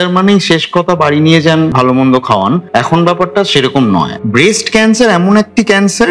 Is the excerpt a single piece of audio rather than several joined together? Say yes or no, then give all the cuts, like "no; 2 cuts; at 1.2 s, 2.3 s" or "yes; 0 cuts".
no; 3 cuts; at 1.7 s, 2.6 s, 4.1 s